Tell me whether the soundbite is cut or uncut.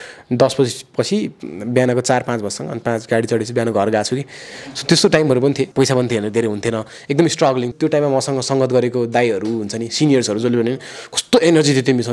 cut